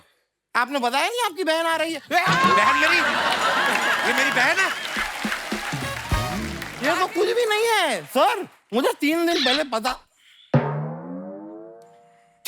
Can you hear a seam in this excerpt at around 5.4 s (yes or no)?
no